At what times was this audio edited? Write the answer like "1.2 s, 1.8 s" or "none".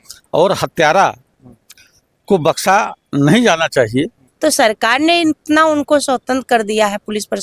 4.2 s

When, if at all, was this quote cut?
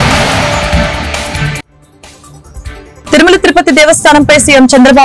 3.1 s

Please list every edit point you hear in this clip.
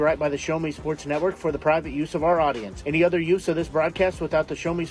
none

